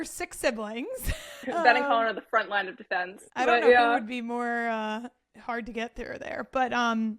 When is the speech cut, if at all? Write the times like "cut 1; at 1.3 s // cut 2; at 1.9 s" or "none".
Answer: cut 1; at 1.4 s // cut 2; at 3.2 s